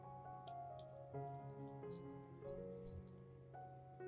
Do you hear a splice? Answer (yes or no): no